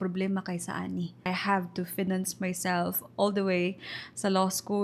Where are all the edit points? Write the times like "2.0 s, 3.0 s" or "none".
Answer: 1.3 s